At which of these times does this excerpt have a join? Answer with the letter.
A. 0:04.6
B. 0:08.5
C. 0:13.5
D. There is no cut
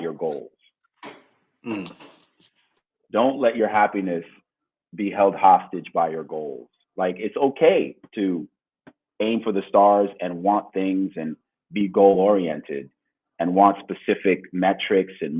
D